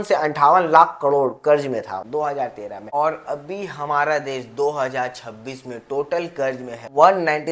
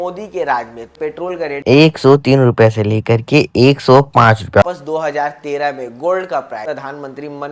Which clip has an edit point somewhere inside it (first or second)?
second